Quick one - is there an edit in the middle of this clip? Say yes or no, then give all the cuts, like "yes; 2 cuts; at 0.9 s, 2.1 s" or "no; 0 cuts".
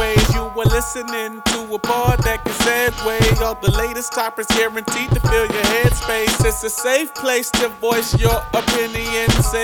no; 0 cuts